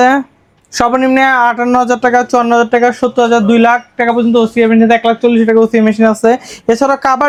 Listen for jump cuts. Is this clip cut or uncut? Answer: uncut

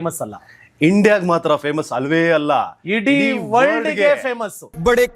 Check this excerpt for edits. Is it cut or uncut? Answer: uncut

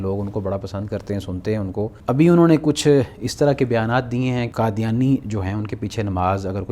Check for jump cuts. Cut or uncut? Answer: cut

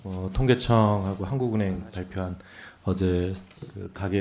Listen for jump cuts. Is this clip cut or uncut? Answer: uncut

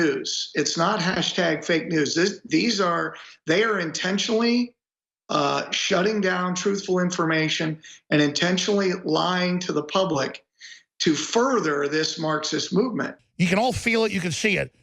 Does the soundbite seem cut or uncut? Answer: cut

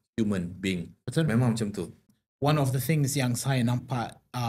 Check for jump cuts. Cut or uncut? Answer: cut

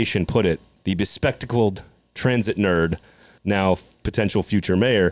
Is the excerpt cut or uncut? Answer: uncut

